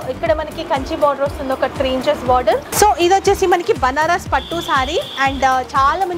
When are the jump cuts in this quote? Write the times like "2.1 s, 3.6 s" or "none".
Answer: 2.7 s